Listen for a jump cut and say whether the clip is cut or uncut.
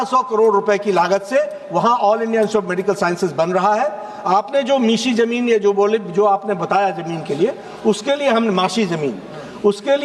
uncut